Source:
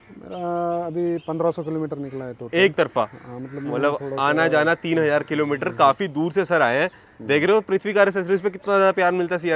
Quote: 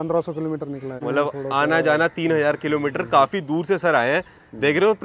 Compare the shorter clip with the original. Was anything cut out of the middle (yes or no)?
yes